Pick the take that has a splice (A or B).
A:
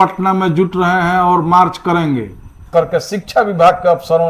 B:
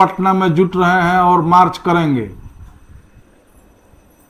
A